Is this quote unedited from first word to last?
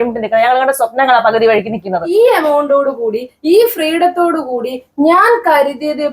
no; 1 cut; at 2.1 s

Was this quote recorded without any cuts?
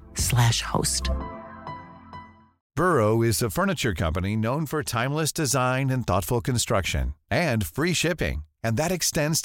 no; 1 cut; at 2.5 s

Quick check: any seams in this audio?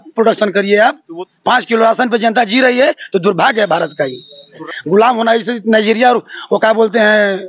yes; 2 cuts; at 1.1 s, 4.6 s

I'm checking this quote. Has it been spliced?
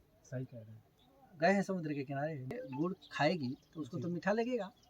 yes; 1 cut; at 2.5 s

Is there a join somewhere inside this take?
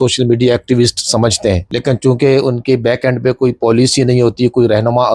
yes; 1 cut; at 1.7 s

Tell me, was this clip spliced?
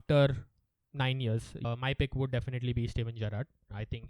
yes; 1 cut; at 1.6 s

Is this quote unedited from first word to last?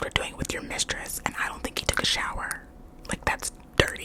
yes; 0 cuts

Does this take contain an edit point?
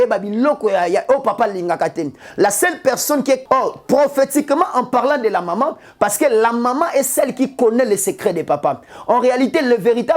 yes; 1 cut; at 3.4 s

